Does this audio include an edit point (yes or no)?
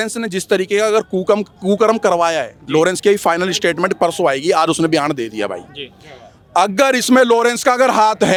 no